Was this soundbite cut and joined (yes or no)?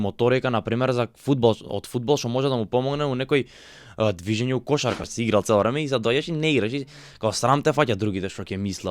yes